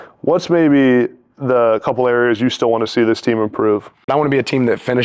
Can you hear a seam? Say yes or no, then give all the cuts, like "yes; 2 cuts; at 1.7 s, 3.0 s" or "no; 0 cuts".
yes; 1 cut; at 4.0 s